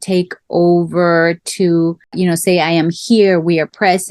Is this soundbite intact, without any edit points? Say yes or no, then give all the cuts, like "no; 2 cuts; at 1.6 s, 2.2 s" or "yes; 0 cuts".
yes; 0 cuts